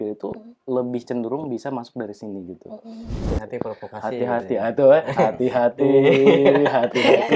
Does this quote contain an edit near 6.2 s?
no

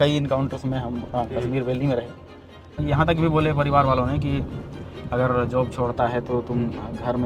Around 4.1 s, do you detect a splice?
no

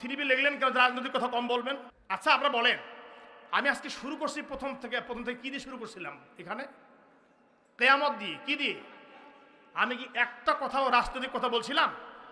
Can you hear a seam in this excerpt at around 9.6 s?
no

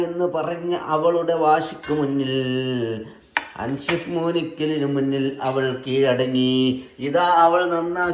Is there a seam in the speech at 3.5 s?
no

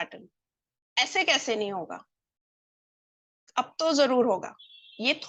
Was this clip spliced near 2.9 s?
no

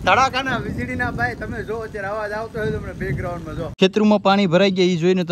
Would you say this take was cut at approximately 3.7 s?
yes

